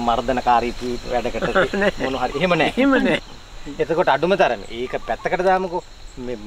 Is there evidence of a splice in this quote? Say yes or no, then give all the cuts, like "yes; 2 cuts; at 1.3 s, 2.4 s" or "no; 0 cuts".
yes; 1 cut; at 3.2 s